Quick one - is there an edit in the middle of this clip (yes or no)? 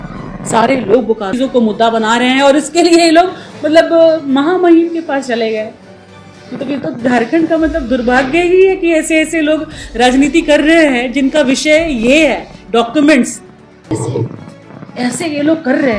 yes